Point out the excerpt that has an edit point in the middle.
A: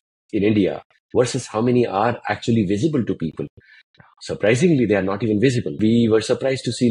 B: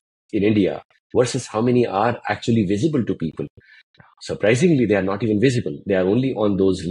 A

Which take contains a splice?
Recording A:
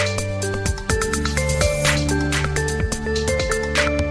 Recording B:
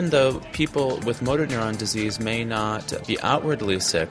B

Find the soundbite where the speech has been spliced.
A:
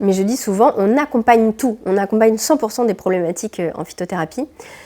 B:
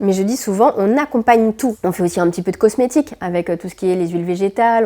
B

